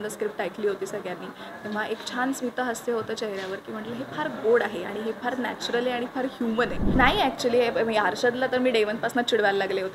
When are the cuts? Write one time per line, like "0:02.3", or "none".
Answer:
0:06.8